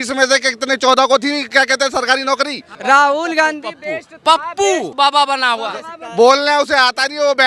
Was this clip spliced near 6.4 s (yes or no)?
no